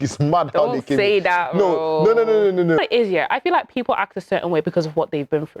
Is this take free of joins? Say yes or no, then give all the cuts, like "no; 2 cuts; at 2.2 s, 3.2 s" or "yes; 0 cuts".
no; 1 cut; at 2.8 s